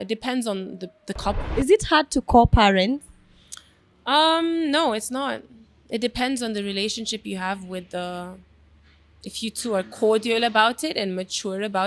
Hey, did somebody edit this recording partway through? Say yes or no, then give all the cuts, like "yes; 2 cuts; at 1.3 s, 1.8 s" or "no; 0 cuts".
yes; 1 cut; at 1.4 s